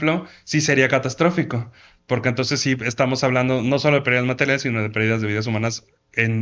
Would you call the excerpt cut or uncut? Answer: uncut